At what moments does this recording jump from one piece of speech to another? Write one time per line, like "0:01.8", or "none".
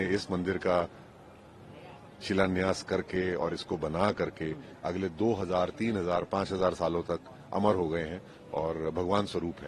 none